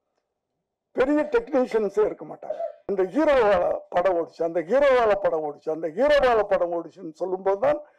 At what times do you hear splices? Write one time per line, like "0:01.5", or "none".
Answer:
0:02.8